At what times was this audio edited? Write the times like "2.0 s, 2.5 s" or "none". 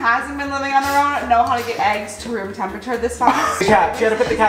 3.5 s